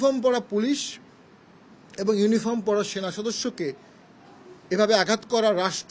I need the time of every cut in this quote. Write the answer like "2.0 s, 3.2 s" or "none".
none